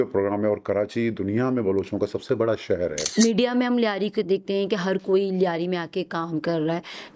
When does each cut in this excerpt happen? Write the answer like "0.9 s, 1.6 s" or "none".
3.0 s